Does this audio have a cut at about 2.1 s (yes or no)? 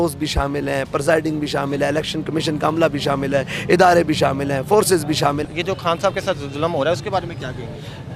no